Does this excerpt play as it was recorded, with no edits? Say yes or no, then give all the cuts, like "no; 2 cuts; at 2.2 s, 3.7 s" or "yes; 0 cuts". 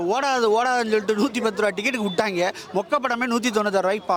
yes; 0 cuts